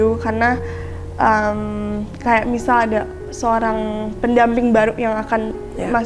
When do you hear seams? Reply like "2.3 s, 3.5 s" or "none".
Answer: none